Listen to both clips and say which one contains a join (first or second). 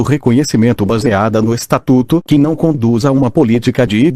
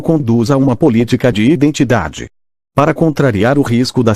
second